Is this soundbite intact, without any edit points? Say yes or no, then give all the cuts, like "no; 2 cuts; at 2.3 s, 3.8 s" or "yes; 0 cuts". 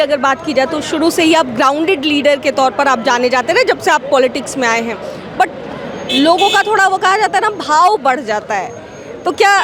yes; 0 cuts